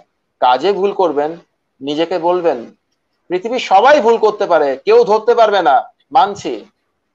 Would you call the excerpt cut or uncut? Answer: uncut